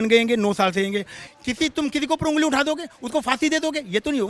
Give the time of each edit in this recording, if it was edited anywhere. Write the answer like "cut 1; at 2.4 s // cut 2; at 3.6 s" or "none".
cut 1; at 1.2 s